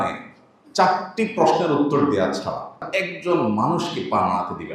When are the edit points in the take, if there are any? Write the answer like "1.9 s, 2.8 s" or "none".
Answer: 2.9 s